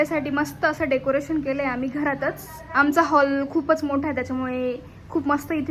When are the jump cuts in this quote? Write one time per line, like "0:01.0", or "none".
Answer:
none

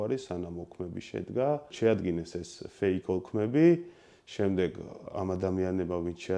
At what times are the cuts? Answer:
0:01.7

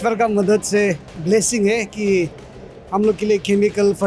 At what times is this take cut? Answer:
0:01.1

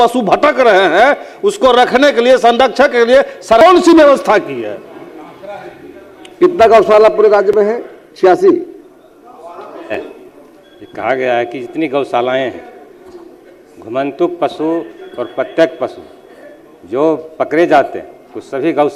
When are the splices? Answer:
none

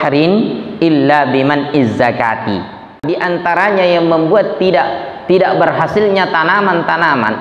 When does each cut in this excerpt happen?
0:03.0

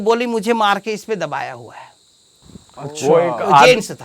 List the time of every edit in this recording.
none

